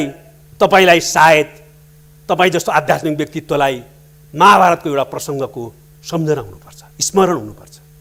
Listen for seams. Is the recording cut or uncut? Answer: uncut